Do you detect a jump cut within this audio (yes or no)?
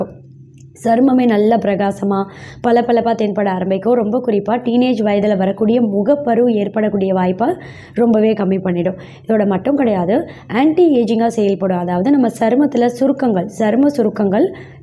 no